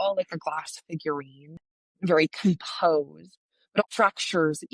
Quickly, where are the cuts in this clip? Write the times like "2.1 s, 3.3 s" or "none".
1.5 s, 3.8 s